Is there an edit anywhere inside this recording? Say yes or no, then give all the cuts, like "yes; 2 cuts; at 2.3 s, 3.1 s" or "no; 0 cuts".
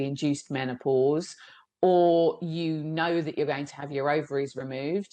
no; 0 cuts